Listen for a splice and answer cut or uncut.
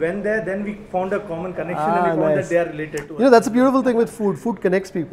uncut